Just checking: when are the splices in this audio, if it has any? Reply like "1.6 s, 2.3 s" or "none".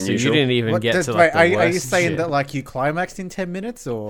0.9 s